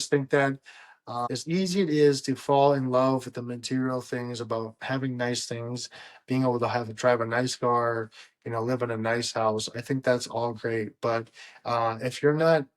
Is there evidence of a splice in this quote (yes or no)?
yes